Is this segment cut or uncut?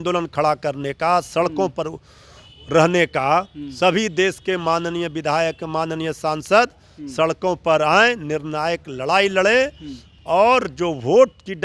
uncut